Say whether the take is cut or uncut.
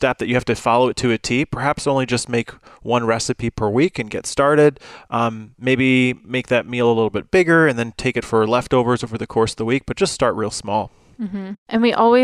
uncut